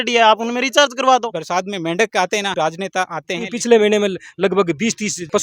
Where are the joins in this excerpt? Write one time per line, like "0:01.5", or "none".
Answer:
0:01.3
0:03.5